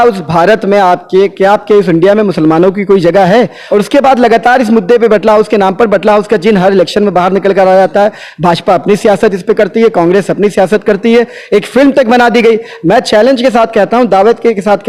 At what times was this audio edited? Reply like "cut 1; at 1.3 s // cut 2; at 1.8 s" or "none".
cut 1; at 3.6 s